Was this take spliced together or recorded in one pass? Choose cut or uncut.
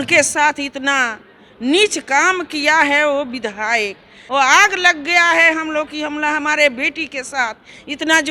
cut